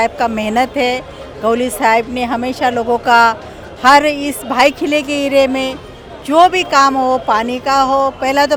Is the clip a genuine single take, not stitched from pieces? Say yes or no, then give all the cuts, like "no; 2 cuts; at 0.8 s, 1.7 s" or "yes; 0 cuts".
yes; 0 cuts